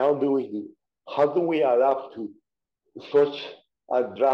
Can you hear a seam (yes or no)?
no